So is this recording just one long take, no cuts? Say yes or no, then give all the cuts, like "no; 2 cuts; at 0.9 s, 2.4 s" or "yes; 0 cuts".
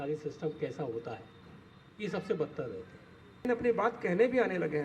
no; 1 cut; at 3.5 s